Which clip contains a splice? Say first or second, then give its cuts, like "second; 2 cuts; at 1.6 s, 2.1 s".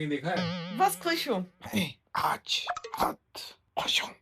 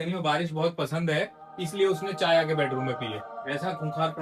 first; 1 cut; at 1.5 s